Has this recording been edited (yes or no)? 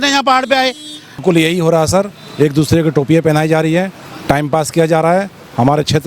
yes